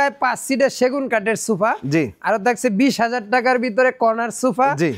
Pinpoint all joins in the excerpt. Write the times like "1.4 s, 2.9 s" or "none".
none

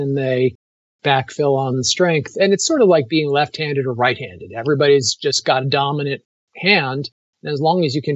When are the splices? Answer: none

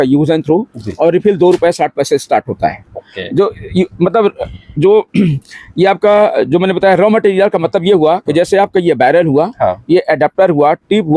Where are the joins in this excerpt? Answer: none

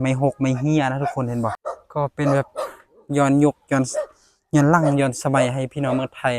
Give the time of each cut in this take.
1.6 s

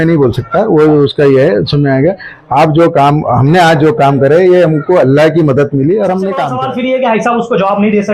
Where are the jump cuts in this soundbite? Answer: 6.5 s

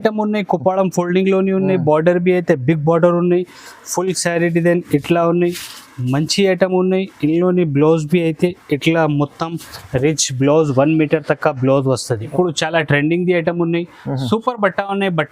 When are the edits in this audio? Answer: 12.3 s

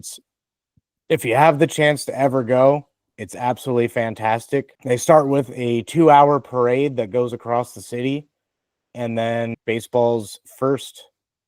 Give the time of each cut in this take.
4.7 s, 9.5 s

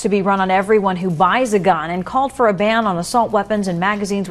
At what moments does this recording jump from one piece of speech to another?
1.9 s

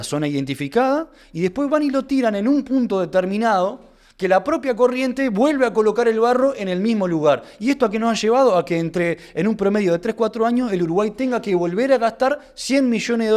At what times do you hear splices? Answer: none

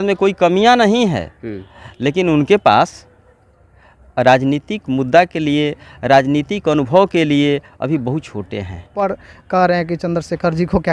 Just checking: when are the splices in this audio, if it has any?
9.0 s

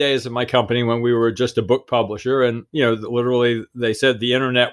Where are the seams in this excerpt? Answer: none

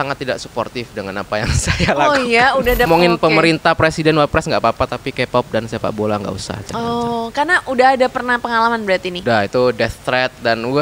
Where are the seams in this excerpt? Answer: 2.9 s, 9.1 s

